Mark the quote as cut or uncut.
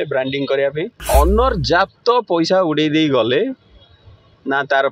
cut